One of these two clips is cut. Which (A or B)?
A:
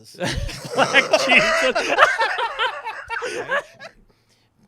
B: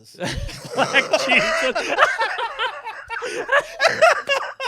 A